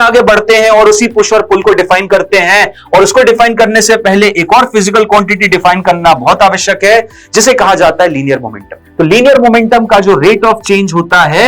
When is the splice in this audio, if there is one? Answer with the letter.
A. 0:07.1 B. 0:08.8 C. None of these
B